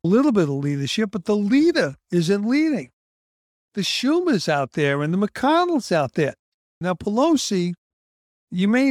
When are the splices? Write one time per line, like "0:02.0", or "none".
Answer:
0:06.7